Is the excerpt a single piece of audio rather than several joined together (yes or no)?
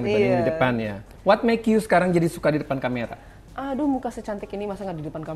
yes